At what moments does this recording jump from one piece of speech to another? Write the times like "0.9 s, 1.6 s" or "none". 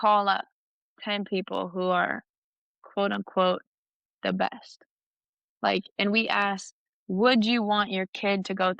none